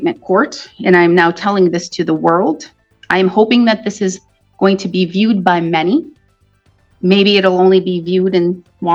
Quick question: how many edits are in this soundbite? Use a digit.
0